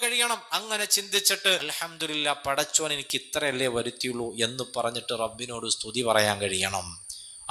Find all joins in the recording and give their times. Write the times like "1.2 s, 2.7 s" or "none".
1.7 s